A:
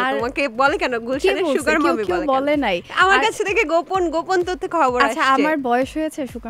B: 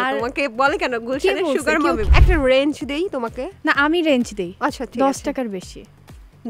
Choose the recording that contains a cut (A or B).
B